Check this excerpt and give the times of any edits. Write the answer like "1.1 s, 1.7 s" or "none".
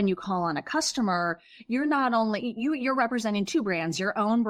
none

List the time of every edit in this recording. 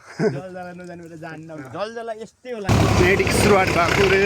2.7 s

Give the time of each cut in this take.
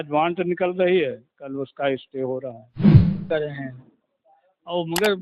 2.7 s, 3.2 s

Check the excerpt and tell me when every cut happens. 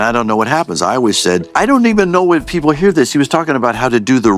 1.5 s

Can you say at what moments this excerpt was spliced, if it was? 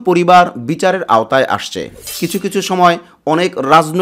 2.0 s

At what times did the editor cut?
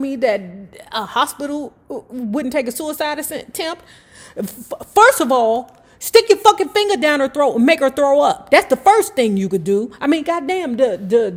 none

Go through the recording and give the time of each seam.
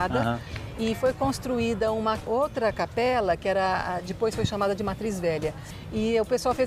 5.6 s

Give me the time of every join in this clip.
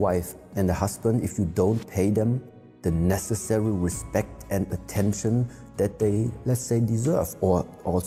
none

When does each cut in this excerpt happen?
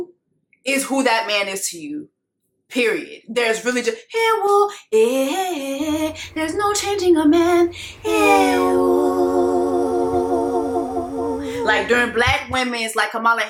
none

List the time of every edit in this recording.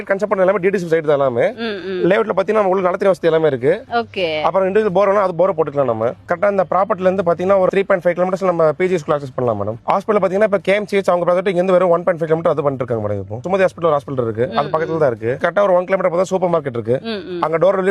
6.3 s, 9.8 s, 15.4 s

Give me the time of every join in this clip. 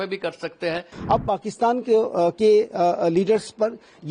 0.9 s

